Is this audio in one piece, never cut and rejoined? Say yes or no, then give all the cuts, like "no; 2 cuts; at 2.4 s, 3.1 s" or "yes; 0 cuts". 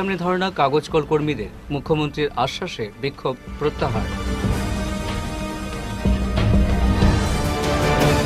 yes; 0 cuts